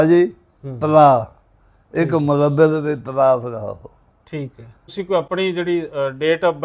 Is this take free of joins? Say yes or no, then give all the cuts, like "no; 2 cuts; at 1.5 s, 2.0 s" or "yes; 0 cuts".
no; 1 cut; at 4.8 s